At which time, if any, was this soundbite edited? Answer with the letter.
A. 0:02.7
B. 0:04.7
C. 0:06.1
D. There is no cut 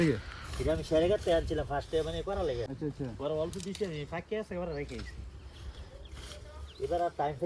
D